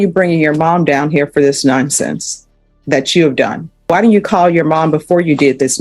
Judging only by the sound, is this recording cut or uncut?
cut